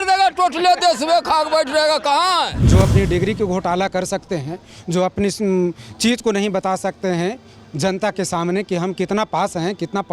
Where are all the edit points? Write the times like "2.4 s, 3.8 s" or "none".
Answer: 2.6 s